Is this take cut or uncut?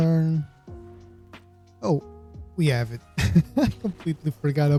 uncut